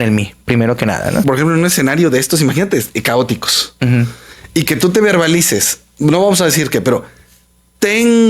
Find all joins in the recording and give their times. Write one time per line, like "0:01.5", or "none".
0:01.2